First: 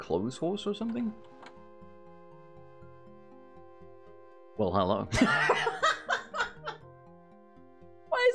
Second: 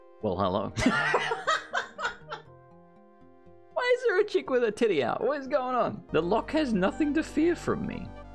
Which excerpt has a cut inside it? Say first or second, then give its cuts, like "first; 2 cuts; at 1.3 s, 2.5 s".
second; 1 cut; at 6.0 s